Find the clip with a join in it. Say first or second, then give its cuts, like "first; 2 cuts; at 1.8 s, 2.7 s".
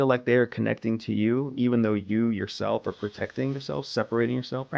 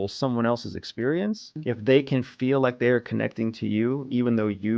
second; 1 cut; at 1.5 s